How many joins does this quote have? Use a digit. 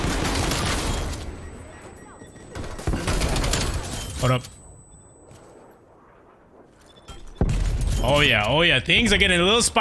0